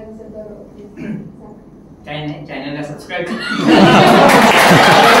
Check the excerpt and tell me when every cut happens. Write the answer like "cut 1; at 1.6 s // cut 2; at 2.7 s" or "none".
none